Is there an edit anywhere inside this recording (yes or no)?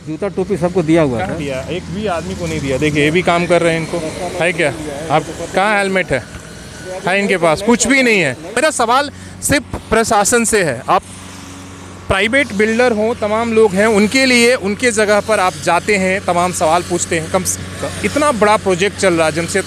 no